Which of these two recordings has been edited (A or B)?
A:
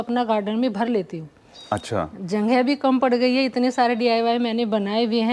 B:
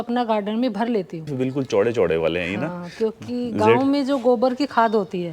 B